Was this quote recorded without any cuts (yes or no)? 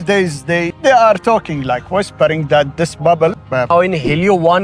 no